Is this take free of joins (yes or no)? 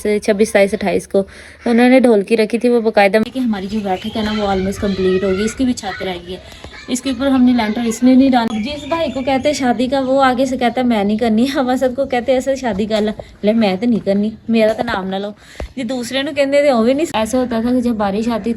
no